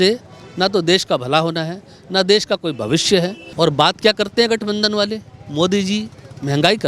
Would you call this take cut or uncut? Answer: cut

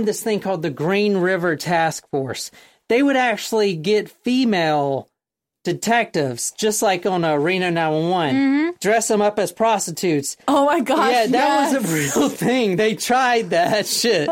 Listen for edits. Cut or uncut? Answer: uncut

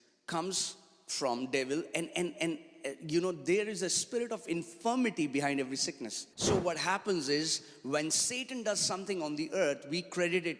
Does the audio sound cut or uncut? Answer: cut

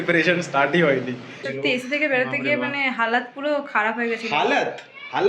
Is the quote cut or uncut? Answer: cut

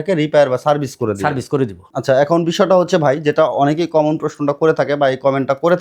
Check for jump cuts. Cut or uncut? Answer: cut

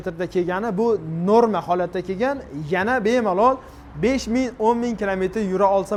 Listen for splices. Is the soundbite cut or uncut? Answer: uncut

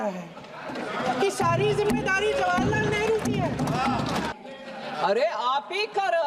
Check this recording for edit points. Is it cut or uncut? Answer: cut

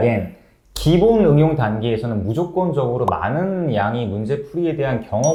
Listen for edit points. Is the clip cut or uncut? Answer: uncut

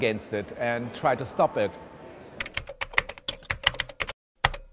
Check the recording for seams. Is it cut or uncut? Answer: cut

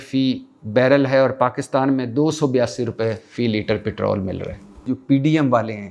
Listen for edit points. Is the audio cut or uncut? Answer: cut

